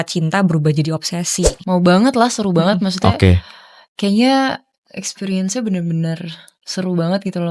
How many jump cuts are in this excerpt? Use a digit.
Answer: 1